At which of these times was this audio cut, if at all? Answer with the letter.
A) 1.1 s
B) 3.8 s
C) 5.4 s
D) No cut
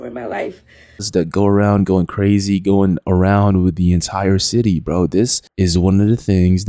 A